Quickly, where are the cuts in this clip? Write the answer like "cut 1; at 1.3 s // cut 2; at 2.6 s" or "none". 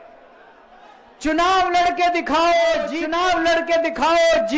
cut 1; at 3.0 s